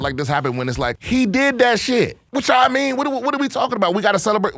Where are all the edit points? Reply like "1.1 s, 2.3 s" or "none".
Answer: 1.0 s, 2.2 s